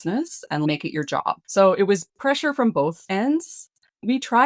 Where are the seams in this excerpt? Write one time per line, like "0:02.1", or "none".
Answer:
0:01.4
0:03.0